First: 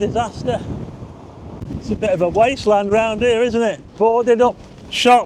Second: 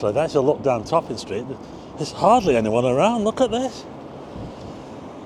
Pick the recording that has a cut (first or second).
first